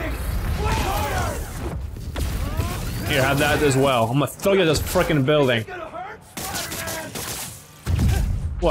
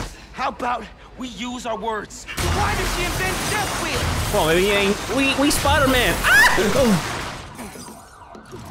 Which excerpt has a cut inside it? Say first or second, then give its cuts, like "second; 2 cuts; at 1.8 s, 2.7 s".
second; 1 cut; at 2.2 s